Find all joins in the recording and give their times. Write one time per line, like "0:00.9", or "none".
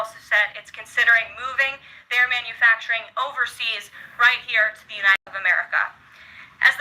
0:05.2